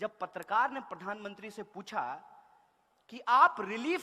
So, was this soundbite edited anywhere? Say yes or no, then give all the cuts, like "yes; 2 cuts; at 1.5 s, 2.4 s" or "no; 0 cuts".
no; 0 cuts